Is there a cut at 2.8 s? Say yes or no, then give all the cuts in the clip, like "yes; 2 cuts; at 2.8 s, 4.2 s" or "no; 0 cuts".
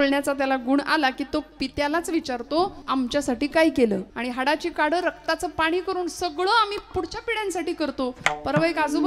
yes; 2 cuts; at 2.8 s, 4.1 s